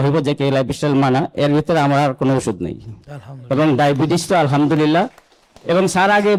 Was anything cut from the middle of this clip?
no; 0 cuts

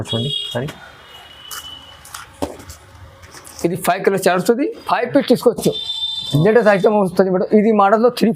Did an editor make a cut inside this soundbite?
no; 0 cuts

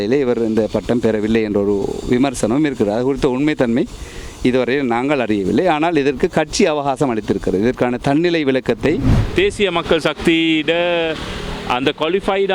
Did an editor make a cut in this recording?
yes; 1 cut; at 9.2 s

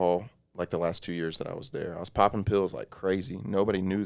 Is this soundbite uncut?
yes; 0 cuts

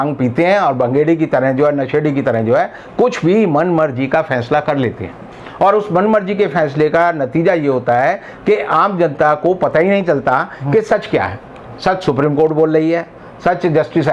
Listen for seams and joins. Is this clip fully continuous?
yes; 0 cuts

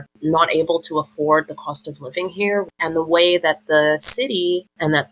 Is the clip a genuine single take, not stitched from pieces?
no; 1 cut; at 2.8 s

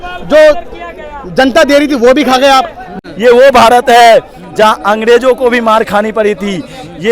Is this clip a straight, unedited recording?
no; 1 cut; at 2.9 s

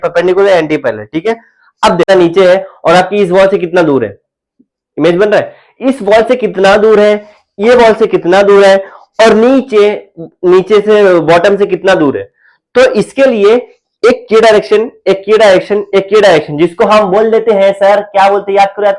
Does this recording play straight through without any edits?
no; 1 cut; at 2.1 s

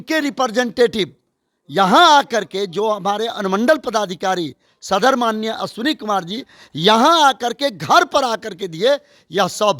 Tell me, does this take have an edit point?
no; 0 cuts

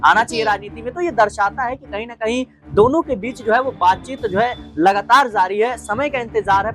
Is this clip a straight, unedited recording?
yes; 0 cuts

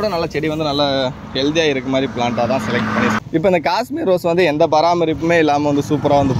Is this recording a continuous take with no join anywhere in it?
no; 1 cut; at 3.2 s

